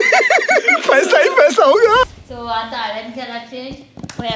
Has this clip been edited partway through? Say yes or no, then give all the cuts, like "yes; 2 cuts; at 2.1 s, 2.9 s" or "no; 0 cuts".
yes; 1 cut; at 2.0 s